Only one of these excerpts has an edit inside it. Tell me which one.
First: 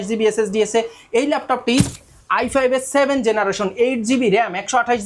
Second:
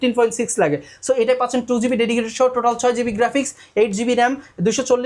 first; 1 cut; at 2.0 s

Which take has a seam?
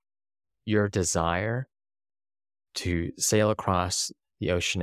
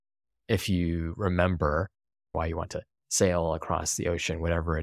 second; 1 cut; at 2.2 s

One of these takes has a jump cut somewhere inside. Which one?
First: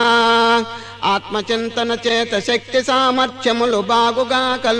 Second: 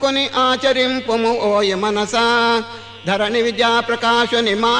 second; 1 cut; at 1.5 s

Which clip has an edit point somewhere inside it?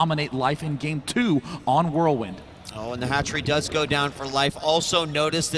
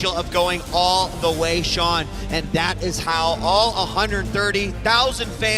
second; 1 cut; at 2.5 s

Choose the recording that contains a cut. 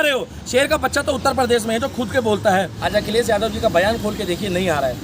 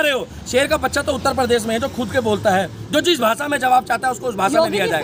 first; 1 cut; at 2.8 s

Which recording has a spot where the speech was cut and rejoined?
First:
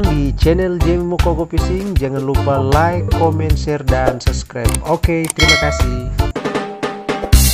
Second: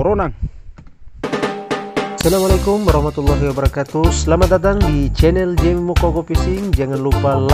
second; 1 cut; at 1.1 s

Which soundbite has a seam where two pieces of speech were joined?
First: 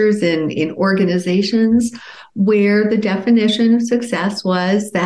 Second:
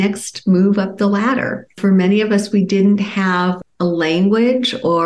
second; 1 cut; at 1.8 s

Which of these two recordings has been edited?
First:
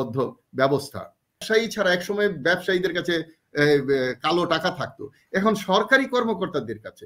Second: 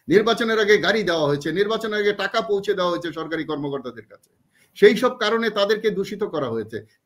first; 1 cut; at 1.4 s

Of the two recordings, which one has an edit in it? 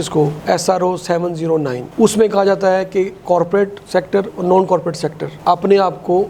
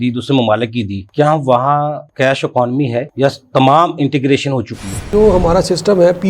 second; 2 cuts; at 1.0 s, 5.0 s

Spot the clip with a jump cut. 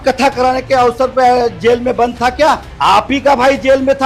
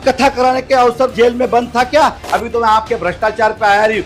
second; 2 cuts; at 1.1 s, 2.2 s

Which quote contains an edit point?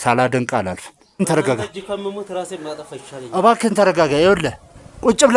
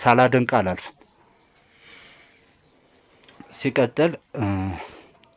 first; 1 cut; at 1.2 s

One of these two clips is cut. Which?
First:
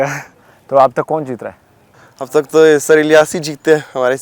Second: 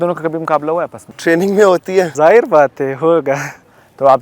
second; 2 cuts; at 1.1 s, 2.1 s

